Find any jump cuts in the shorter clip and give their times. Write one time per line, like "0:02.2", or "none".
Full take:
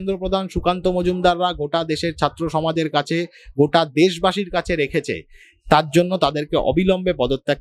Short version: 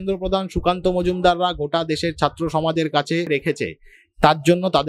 0:03.3